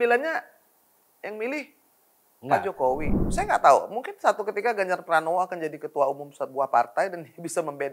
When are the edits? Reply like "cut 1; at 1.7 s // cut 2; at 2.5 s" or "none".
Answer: cut 1; at 3.2 s

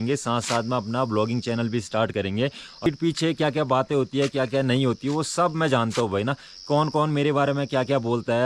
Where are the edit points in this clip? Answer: cut 1; at 2.9 s

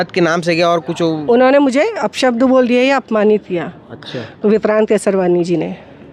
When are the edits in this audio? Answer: none

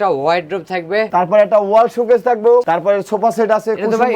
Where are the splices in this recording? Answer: cut 1; at 1.1 s // cut 2; at 2.6 s

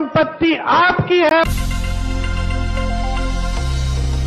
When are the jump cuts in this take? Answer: cut 1; at 1.4 s

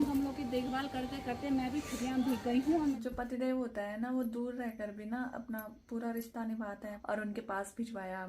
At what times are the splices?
cut 1; at 3.0 s // cut 2; at 7.0 s

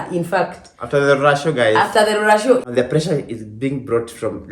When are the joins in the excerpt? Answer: cut 1; at 2.6 s

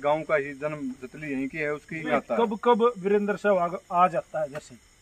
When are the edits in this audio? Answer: cut 1; at 2.1 s

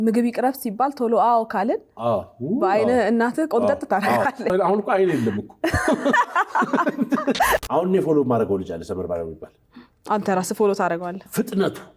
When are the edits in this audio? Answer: cut 1; at 4.5 s // cut 2; at 7.6 s

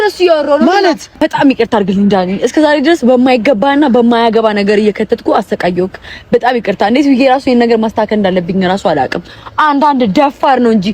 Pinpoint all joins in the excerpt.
cut 1; at 1.1 s

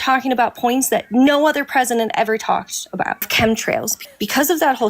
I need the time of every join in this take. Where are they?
cut 1; at 3.3 s // cut 2; at 4.0 s

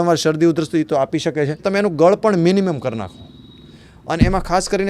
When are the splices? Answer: cut 1; at 1.6 s

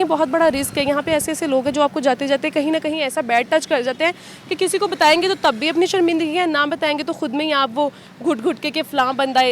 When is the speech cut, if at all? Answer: none

